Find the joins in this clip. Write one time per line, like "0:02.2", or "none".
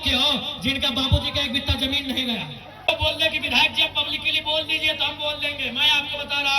0:02.9